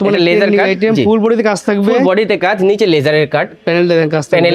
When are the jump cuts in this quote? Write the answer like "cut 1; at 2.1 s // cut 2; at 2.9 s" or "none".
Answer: none